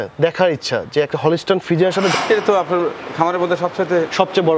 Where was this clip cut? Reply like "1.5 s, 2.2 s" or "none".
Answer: 2.1 s